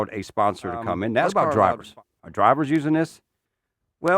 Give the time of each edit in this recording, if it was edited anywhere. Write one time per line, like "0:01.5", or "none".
0:01.3